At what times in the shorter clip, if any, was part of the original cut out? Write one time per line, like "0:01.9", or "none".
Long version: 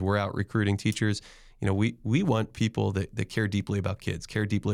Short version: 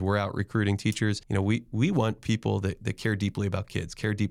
0:01.2